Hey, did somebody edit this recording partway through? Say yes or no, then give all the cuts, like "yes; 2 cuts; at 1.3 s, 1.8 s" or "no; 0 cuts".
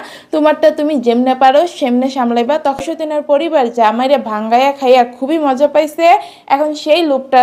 yes; 1 cut; at 2.8 s